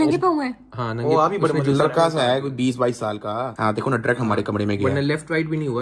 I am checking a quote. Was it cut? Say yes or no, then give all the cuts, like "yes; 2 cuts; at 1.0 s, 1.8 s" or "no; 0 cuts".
no; 0 cuts